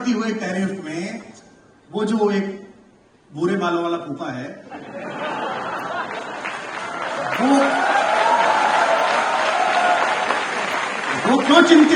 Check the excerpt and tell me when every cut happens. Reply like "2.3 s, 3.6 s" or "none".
none